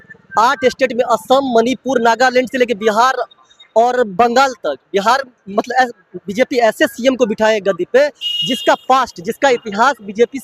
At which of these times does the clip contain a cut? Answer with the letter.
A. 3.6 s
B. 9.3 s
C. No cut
C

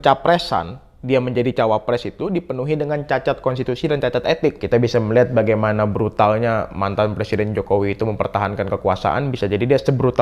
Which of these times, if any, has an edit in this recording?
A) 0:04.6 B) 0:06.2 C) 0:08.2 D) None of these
A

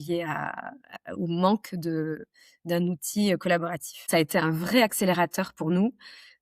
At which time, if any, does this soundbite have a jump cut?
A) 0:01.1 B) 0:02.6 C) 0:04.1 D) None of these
C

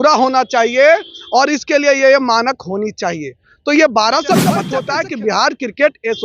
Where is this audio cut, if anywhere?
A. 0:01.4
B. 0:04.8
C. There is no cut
B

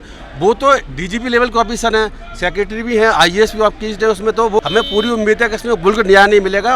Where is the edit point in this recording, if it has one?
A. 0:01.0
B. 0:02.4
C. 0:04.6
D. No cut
C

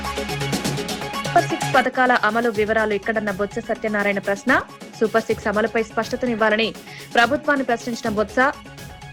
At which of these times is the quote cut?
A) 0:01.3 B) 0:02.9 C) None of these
A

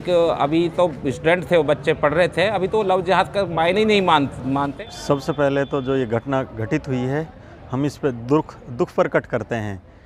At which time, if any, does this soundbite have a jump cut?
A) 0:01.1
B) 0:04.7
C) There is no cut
B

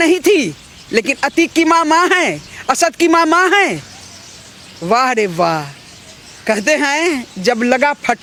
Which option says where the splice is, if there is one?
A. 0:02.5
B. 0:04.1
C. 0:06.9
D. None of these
D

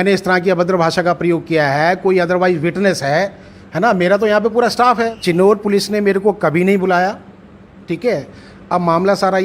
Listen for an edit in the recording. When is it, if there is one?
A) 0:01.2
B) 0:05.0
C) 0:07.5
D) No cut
B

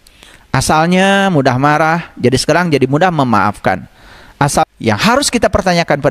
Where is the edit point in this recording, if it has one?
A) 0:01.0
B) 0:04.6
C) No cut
B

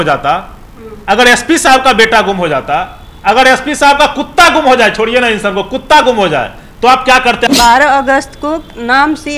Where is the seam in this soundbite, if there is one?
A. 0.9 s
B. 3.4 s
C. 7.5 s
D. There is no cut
C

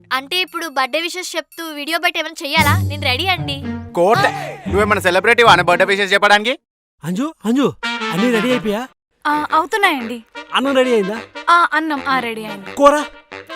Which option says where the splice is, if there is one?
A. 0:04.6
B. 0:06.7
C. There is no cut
B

